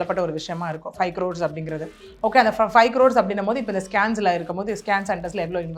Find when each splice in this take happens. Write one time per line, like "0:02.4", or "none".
none